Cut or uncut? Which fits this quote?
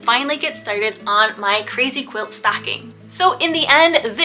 cut